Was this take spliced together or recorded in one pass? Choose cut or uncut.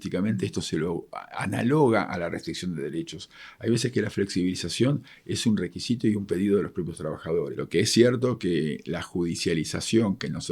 cut